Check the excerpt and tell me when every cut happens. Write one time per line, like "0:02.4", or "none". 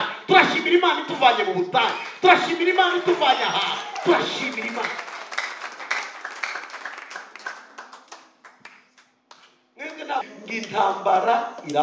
0:10.2